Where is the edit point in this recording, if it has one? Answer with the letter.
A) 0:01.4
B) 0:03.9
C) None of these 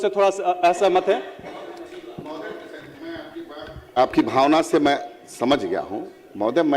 C